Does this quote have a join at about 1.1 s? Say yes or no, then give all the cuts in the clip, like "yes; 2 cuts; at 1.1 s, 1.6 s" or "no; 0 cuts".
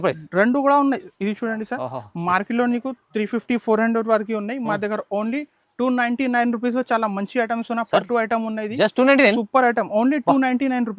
yes; 1 cut; at 1.1 s